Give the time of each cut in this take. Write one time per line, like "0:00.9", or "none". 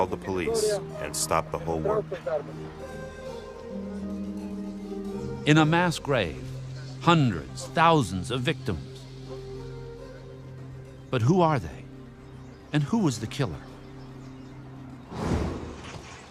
0:08.3